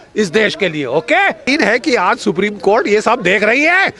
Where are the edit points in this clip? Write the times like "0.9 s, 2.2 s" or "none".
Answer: 1.4 s